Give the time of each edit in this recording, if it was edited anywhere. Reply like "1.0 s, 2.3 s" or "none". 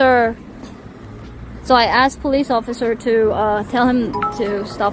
none